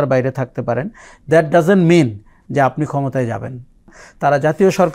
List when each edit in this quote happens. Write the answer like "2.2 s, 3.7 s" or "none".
4.0 s